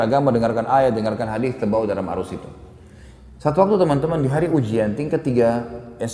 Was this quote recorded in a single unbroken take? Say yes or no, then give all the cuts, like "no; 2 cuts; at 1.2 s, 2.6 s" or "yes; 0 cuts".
yes; 0 cuts